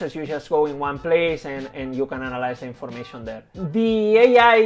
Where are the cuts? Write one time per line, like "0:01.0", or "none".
none